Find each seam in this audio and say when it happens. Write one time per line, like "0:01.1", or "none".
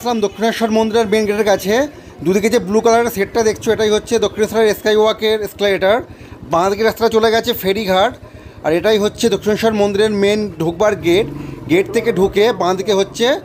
none